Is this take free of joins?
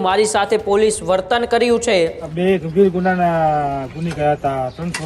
no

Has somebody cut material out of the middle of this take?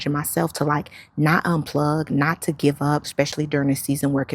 yes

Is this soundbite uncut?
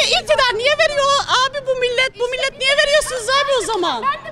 yes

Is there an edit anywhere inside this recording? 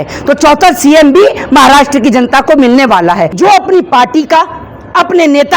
yes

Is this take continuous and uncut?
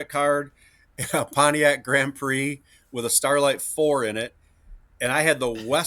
yes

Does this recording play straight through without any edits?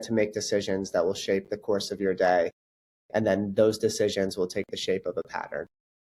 yes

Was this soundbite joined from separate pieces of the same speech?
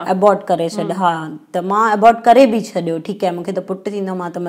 no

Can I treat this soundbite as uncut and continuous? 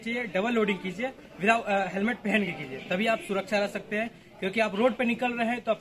yes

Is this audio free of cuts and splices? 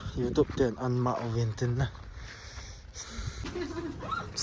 no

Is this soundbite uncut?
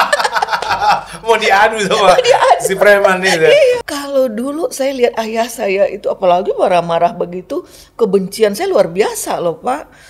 no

